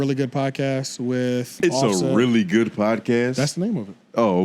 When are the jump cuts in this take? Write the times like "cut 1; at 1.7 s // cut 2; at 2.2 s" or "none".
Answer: cut 1; at 1.6 s